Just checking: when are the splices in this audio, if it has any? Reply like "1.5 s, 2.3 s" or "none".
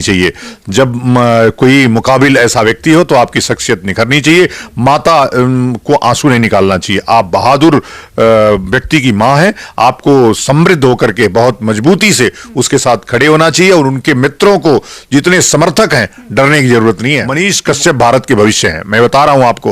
17.3 s